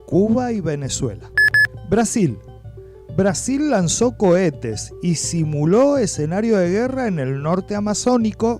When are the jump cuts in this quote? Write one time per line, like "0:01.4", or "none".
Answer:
0:01.5